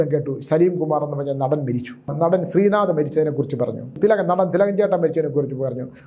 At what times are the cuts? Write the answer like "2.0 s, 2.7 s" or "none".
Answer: 2.1 s, 3.9 s

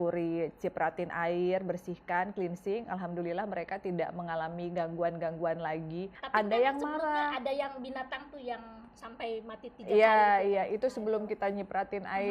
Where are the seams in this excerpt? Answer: 6.1 s

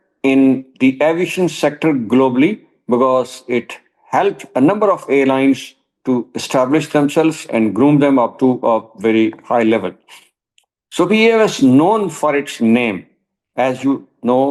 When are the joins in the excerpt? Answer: none

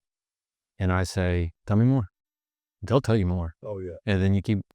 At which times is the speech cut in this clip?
1.6 s

